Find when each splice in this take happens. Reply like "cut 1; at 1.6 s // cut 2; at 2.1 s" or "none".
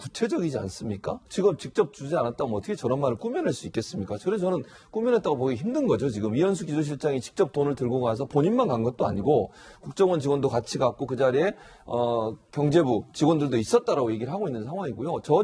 none